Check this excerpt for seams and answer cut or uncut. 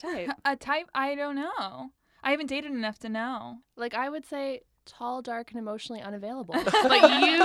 cut